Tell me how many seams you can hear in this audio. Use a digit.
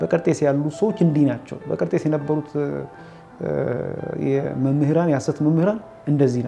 0